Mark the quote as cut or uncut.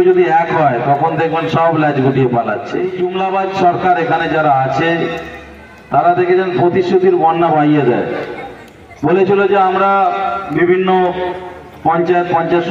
cut